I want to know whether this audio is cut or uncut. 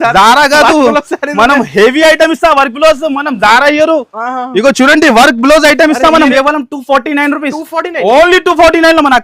cut